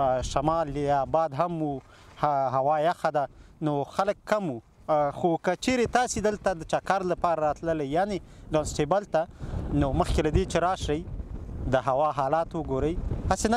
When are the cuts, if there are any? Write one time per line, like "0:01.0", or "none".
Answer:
none